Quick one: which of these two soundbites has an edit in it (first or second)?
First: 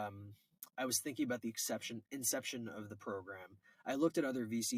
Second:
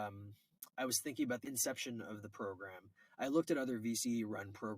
second